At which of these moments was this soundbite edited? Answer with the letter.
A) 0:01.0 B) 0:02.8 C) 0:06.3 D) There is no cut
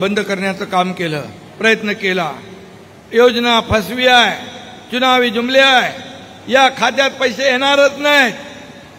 D